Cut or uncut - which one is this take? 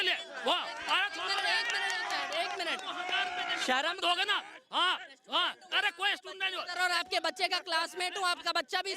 uncut